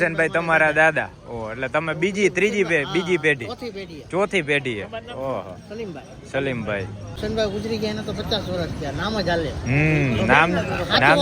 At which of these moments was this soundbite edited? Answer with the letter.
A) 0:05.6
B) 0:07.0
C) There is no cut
B